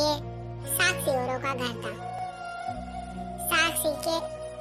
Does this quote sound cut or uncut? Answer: uncut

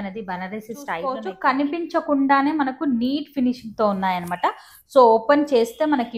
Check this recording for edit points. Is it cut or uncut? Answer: cut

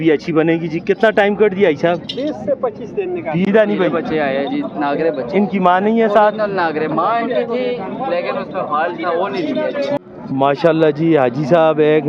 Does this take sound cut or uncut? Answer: cut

